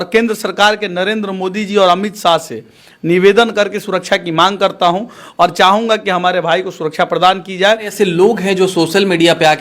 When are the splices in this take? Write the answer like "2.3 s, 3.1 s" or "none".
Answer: 7.9 s

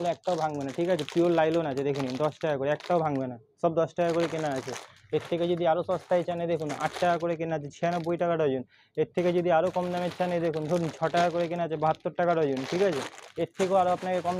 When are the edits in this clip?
none

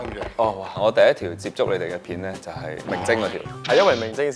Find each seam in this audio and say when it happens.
0.8 s, 2.8 s

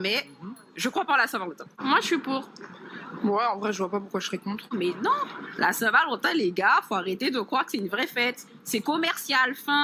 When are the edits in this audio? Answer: 1.7 s, 4.7 s

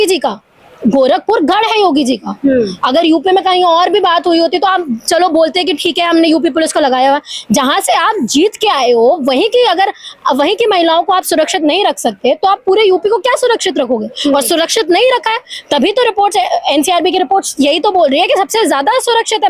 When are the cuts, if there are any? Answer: none

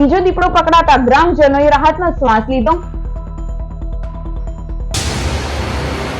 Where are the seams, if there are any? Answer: 4.9 s

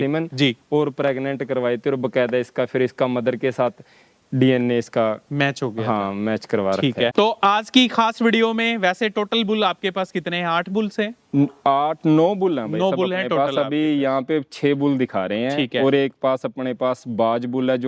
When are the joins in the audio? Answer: 7.1 s

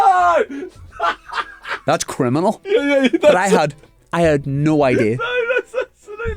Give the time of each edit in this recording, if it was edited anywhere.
1.8 s

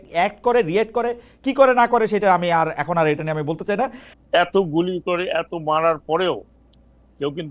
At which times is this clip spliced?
4.0 s

